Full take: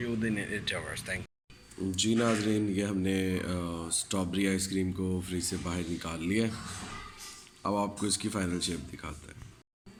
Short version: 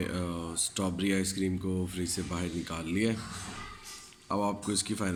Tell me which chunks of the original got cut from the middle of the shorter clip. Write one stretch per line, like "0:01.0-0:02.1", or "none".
none